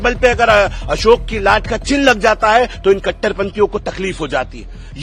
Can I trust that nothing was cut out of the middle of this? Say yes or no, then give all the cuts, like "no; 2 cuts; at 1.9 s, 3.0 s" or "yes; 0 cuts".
yes; 0 cuts